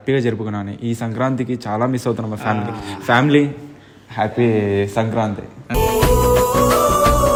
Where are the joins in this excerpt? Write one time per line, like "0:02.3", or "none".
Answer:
none